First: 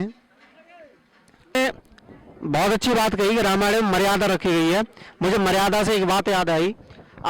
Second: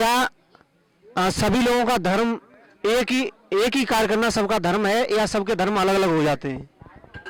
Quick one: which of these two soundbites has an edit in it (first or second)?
first